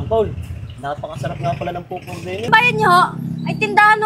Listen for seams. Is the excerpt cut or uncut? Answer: cut